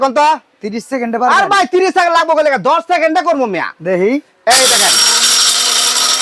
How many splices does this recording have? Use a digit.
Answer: 0